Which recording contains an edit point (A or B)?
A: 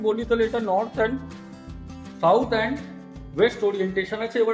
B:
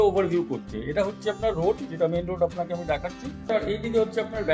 B